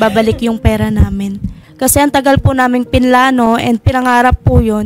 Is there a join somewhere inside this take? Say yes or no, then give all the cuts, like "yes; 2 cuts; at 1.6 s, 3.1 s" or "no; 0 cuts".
yes; 1 cut; at 1.6 s